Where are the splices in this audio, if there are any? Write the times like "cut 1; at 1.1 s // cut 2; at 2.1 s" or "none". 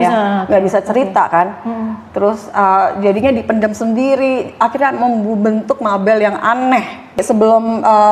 cut 1; at 7.2 s